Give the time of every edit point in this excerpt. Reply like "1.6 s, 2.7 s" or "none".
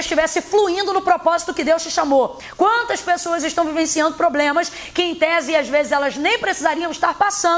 2.4 s